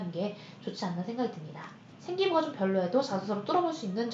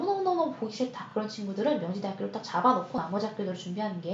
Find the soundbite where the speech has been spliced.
first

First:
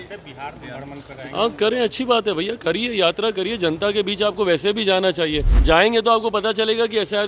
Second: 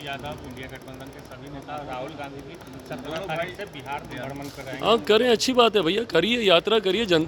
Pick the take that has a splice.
first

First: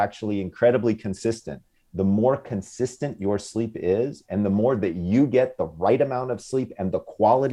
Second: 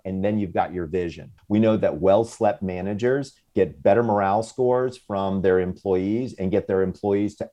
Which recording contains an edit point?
second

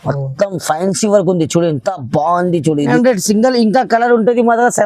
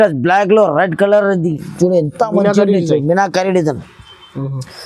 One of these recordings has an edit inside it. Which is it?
first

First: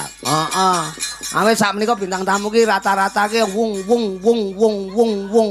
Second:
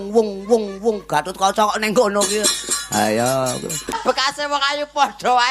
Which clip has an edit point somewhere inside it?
second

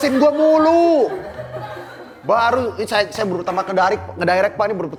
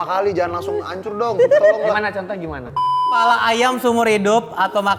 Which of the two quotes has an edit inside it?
second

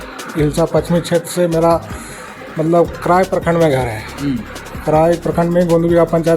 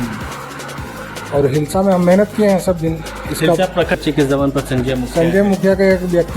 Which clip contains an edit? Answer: second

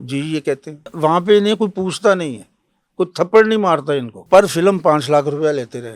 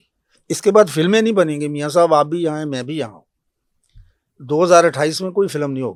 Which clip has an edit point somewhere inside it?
first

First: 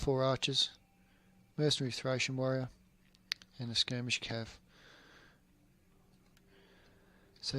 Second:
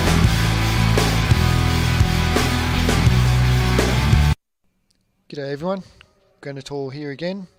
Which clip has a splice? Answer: first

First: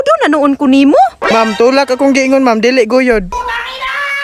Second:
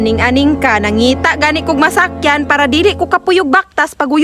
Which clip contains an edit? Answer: first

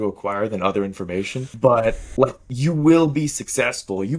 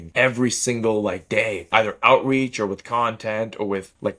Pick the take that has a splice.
second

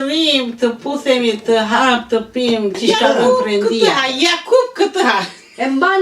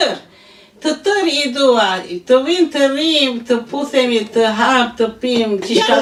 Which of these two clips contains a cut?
first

